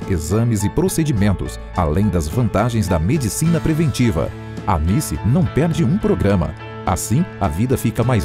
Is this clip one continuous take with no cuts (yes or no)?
yes